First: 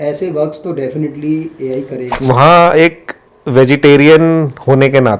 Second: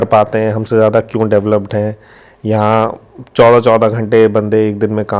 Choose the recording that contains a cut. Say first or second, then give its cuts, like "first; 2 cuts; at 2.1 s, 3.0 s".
first; 1 cut; at 2.0 s